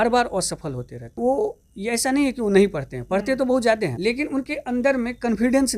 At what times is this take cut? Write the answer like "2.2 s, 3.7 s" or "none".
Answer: 1.0 s, 4.0 s